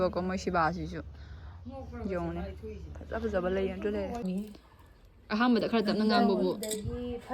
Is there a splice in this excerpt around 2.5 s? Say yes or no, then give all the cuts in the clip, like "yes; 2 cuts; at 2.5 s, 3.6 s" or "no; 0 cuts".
no; 1 cut; at 4.2 s